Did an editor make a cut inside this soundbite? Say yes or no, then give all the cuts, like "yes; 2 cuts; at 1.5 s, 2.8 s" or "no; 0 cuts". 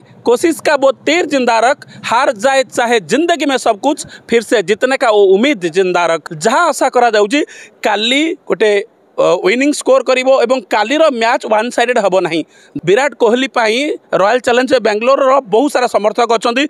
yes; 2 cuts; at 6.3 s, 12.6 s